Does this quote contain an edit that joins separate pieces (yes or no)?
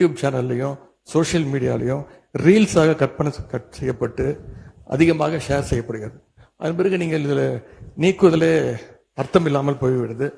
no